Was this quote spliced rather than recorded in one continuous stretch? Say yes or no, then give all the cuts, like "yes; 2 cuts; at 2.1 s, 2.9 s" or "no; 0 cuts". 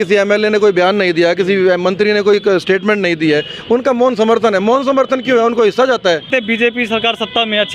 yes; 1 cut; at 6.3 s